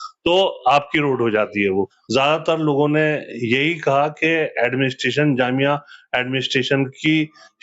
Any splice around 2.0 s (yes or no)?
yes